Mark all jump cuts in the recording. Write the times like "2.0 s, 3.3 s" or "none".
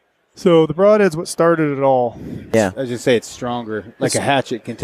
2.5 s